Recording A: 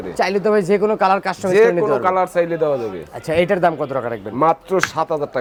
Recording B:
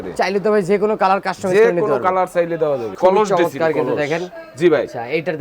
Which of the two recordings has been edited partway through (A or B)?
B